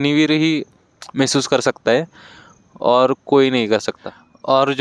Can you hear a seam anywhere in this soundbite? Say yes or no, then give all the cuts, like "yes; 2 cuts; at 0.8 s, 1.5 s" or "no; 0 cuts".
no; 0 cuts